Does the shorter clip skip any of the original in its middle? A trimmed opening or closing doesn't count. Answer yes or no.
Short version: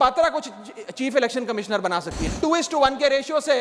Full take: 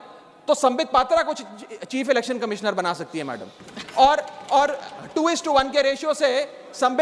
yes